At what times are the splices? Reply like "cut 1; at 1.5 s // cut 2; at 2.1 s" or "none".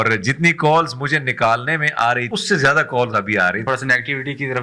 cut 1; at 2.3 s // cut 2; at 3.6 s